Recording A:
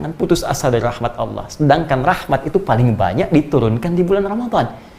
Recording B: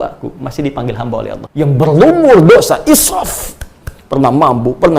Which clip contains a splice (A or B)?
B